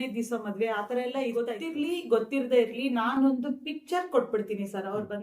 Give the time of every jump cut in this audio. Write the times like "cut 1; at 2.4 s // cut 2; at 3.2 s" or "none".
cut 1; at 1.6 s